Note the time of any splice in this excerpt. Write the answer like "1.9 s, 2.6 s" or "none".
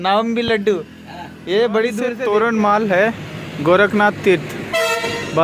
2.2 s